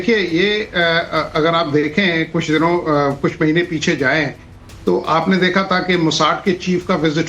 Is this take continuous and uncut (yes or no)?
no